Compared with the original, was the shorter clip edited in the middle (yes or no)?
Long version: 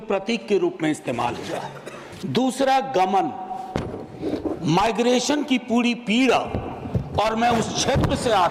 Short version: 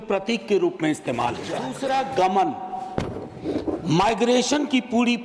yes